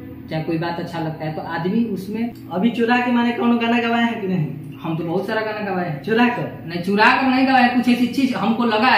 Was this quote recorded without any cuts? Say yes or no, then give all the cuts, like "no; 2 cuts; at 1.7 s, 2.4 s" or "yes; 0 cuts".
no; 1 cut; at 2.4 s